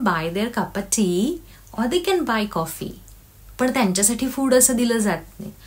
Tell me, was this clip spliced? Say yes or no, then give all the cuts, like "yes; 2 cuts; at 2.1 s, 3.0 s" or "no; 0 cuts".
no; 0 cuts